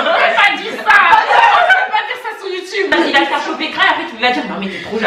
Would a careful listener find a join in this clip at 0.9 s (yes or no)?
no